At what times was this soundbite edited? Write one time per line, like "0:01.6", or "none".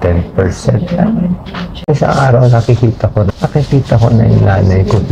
0:01.9